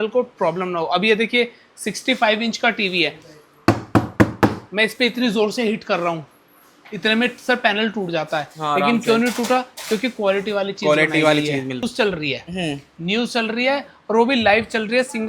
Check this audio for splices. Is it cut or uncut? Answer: cut